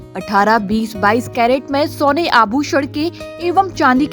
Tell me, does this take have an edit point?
no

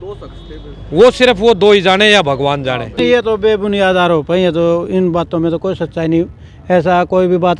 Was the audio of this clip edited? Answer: yes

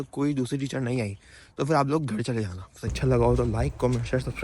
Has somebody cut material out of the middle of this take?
yes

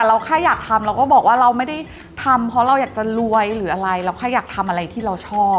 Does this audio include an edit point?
no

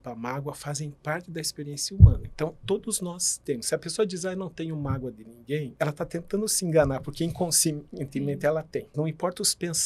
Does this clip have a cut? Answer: yes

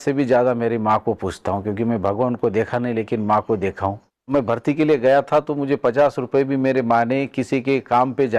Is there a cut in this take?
yes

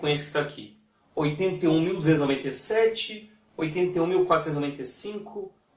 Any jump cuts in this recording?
yes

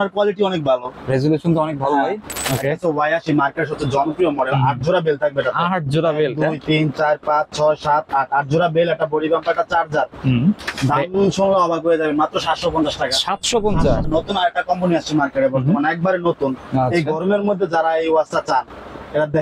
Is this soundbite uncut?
no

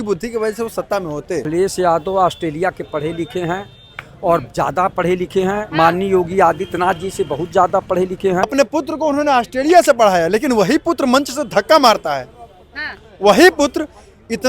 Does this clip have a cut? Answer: yes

